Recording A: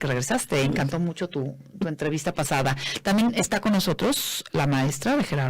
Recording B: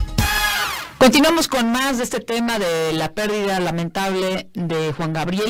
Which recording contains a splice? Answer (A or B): A